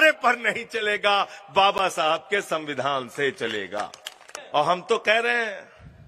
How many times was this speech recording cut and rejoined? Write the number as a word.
zero